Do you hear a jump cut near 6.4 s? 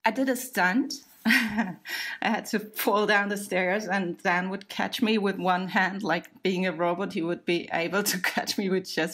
no; 0 cuts

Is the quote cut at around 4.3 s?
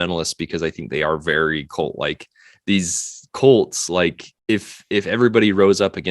yes; 1 cut; at 4.3 s

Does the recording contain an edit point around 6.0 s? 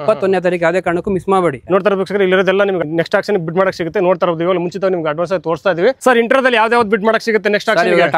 yes; 2 cuts; at 2.8 s, 6.0 s

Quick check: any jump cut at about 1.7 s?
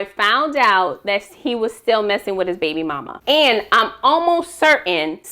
no; 1 cut; at 3.1 s

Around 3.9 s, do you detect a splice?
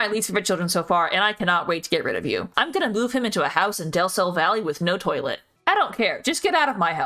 no; 2 cuts; at 2.5 s, 5.5 s

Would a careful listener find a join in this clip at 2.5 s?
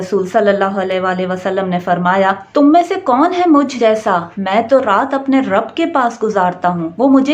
no; 0 cuts

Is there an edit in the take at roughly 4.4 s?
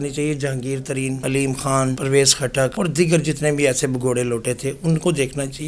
no; 3 cuts; at 1.2 s, 2.0 s, 2.7 s

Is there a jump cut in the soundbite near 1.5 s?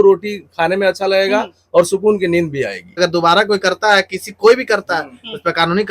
no; 1 cut; at 3.0 s

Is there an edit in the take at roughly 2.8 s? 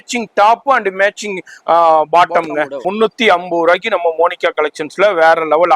yes; 1 cut; at 2.8 s

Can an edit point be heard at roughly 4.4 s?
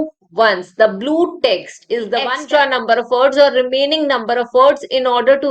no; 1 cut; at 2.3 s

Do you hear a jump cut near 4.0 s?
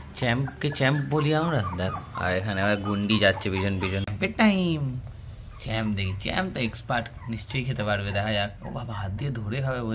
yes; 1 cut; at 4.0 s

